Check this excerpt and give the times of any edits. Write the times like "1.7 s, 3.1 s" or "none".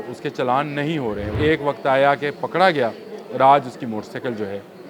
1.3 s